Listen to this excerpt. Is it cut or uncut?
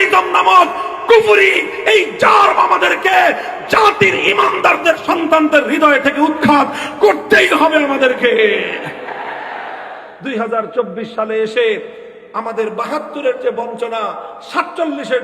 cut